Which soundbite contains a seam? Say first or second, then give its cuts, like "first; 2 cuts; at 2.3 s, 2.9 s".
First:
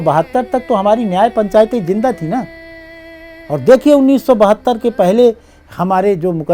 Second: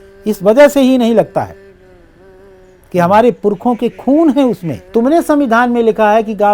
second; 1 cut; at 4.7 s